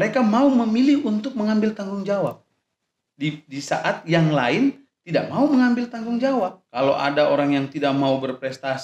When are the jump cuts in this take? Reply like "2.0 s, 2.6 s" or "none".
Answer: 6.6 s